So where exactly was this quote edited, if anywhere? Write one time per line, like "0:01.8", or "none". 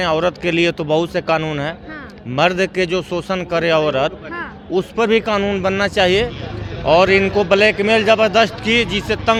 none